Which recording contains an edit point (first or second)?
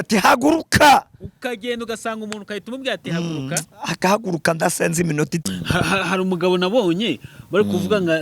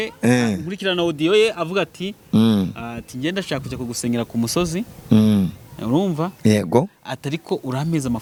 first